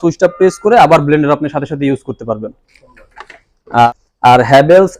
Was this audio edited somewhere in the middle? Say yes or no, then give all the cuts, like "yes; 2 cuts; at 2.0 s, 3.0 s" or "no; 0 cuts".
yes; 1 cut; at 3.9 s